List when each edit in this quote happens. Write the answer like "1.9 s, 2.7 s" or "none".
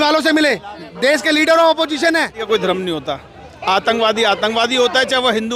2.4 s